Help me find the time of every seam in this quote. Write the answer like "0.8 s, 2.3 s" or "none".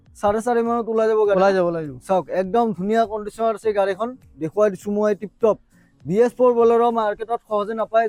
none